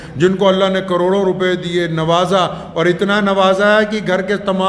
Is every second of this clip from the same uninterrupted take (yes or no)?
yes